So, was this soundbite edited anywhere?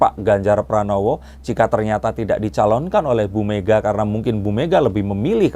no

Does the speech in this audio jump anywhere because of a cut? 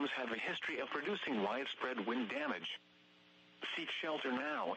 no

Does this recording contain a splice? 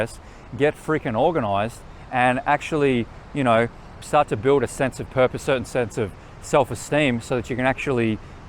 yes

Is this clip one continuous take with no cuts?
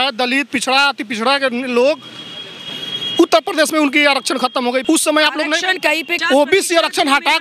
no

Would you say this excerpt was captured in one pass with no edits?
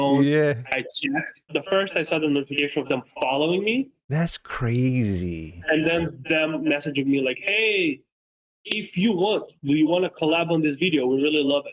no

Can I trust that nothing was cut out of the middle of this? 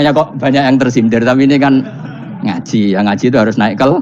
yes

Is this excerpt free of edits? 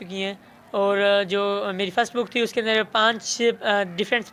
yes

